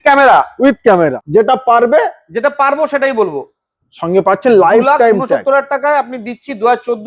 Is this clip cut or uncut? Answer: cut